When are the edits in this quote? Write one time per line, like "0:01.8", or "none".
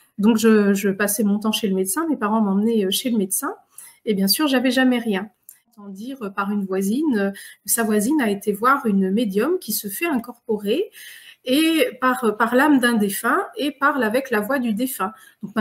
0:05.6